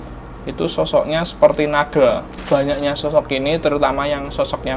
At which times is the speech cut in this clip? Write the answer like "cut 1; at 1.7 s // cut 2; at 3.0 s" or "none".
cut 1; at 2.3 s